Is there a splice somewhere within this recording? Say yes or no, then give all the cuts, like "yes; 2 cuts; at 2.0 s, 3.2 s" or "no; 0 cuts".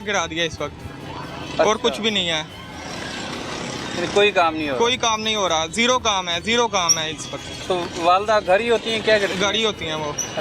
no; 0 cuts